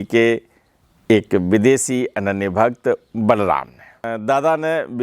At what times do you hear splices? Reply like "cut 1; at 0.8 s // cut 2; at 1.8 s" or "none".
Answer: cut 1; at 4.1 s

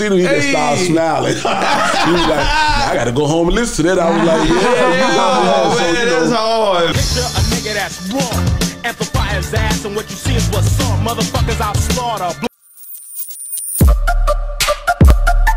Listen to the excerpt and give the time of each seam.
cut 1; at 12.5 s

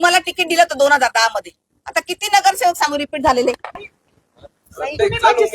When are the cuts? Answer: cut 1; at 3.7 s

